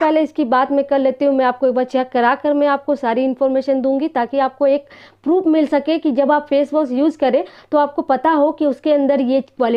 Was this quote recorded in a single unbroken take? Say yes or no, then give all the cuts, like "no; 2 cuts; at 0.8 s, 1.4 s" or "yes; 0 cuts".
yes; 0 cuts